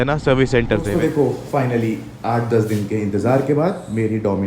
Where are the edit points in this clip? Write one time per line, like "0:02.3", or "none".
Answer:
0:01.1